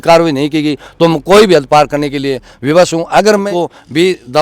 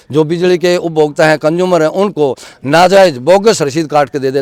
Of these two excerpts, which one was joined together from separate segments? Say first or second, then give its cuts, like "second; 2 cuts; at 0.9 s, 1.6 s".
first; 1 cut; at 3.5 s